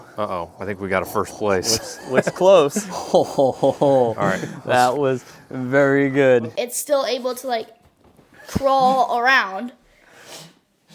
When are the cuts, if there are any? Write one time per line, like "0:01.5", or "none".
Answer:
0:06.4